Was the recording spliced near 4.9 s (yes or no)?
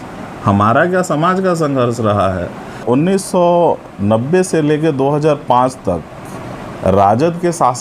no